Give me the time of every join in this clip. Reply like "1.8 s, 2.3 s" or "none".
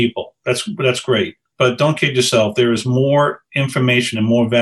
1.5 s